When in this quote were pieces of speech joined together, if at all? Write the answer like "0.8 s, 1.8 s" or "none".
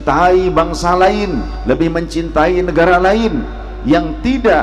1.5 s